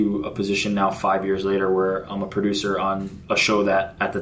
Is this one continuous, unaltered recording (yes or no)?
yes